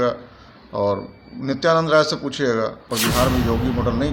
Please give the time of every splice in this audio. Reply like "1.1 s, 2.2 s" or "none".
2.9 s